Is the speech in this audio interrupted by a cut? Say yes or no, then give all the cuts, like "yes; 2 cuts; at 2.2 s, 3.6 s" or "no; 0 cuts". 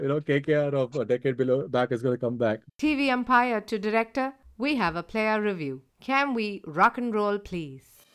yes; 1 cut; at 2.6 s